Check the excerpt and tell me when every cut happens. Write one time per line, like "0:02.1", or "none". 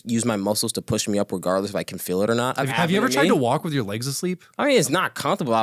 0:02.6